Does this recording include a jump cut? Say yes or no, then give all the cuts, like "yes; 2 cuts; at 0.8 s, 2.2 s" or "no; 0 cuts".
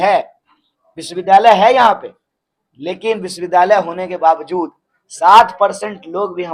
no; 0 cuts